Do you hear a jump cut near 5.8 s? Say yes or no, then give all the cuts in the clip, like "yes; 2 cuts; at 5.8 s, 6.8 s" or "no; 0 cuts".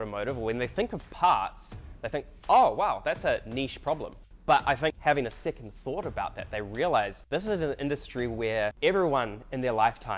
no; 0 cuts